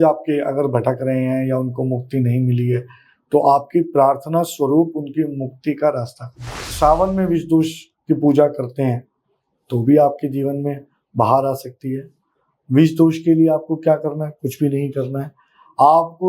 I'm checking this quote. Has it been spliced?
yes; 1 cut; at 6.7 s

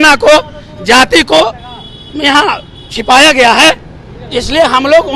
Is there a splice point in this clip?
no; 0 cuts

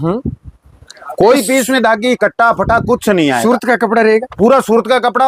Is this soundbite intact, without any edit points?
yes; 0 cuts

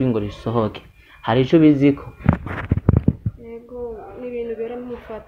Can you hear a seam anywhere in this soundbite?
no; 0 cuts

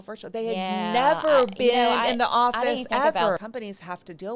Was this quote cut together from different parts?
yes; 1 cut; at 3.4 s

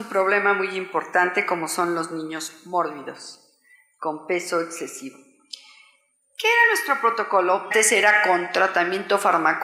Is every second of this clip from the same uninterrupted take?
yes; 0 cuts

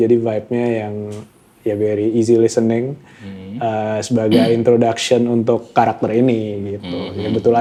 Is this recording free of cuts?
yes; 0 cuts

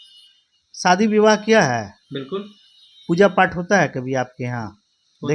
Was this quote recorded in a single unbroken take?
yes; 0 cuts

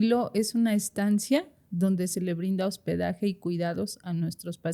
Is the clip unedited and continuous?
yes; 0 cuts

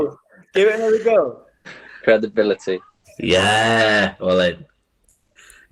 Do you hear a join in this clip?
no; 0 cuts

